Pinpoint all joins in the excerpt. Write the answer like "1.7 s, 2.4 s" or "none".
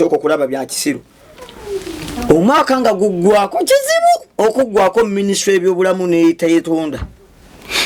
none